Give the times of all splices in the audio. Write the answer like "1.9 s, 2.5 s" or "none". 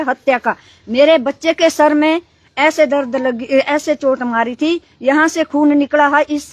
none